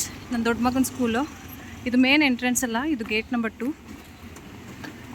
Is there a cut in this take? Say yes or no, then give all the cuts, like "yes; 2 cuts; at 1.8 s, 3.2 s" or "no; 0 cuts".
no; 0 cuts